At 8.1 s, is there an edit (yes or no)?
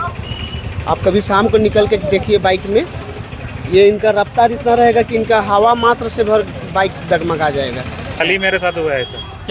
yes